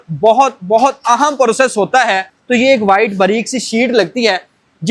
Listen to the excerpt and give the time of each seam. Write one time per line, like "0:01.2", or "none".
0:02.3